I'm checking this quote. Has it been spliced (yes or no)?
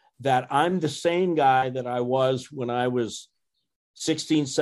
no